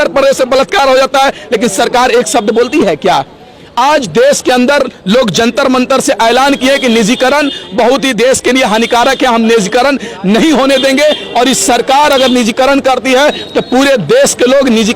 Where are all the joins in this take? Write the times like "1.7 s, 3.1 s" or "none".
none